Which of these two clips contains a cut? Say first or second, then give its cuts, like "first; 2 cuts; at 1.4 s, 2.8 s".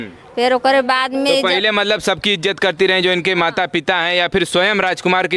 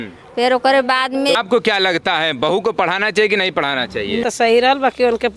second; 2 cuts; at 1.4 s, 4.2 s